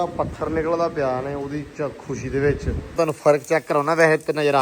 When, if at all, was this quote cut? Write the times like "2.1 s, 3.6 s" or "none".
3.0 s